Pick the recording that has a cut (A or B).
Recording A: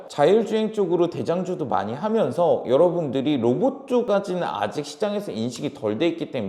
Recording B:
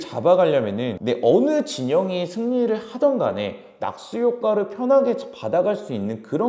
B